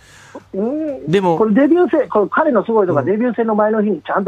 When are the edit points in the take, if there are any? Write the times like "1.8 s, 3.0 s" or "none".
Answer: 3.3 s